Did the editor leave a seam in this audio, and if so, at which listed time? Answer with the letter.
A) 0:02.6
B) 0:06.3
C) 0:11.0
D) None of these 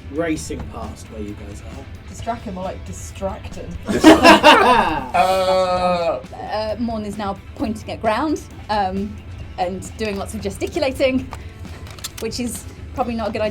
B